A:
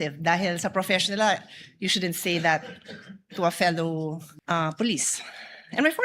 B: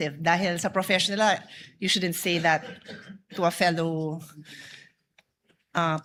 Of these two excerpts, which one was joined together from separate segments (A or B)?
A